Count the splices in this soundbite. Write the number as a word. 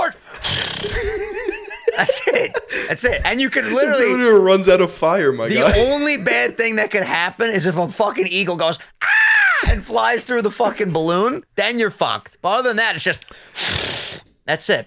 one